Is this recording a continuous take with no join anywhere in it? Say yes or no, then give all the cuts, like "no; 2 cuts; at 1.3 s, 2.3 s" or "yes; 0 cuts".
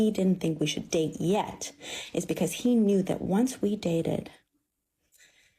yes; 0 cuts